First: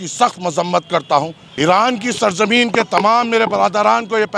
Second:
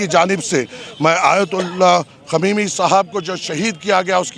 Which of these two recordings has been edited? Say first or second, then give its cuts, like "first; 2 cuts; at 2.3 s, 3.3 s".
first; 1 cut; at 1.4 s